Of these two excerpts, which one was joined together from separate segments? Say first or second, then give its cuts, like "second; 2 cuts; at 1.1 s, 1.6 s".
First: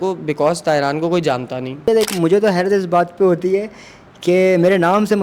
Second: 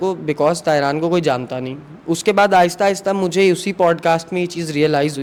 first; 1 cut; at 1.8 s